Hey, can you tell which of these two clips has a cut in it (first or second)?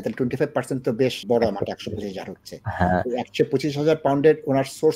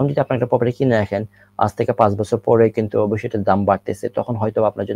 first